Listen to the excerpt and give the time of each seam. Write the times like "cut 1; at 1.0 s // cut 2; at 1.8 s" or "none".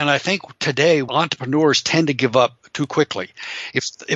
cut 1; at 1.1 s